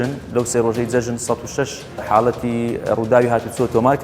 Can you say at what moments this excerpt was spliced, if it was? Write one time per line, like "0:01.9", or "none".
0:02.0